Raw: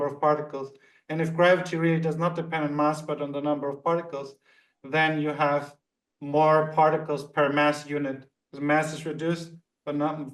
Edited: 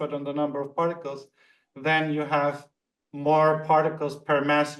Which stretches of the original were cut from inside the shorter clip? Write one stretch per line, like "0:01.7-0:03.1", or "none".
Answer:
none